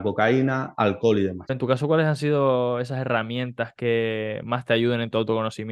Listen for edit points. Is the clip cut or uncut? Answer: cut